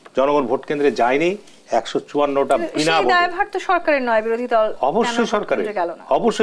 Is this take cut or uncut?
uncut